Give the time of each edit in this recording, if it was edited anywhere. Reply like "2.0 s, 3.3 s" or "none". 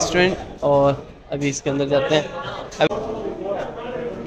2.9 s